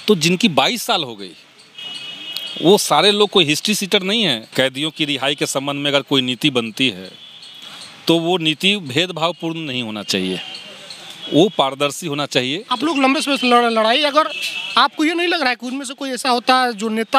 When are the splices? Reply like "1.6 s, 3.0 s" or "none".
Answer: 4.4 s, 12.6 s